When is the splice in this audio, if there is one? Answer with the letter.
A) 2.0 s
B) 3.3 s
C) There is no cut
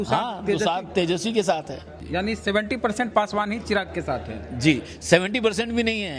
A